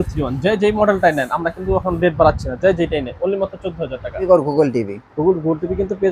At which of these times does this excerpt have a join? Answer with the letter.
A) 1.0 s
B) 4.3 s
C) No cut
B